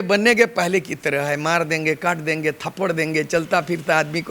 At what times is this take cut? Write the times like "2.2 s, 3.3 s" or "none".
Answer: none